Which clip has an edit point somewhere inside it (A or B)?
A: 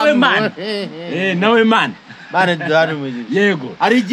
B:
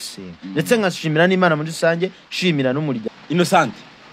B